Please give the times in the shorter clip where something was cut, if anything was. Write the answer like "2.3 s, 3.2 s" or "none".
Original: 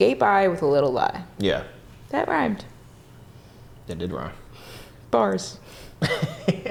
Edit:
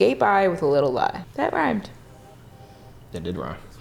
1.2 s